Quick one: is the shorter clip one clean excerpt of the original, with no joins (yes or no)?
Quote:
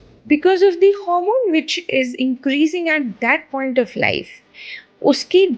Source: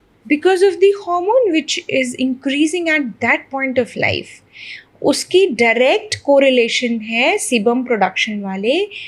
yes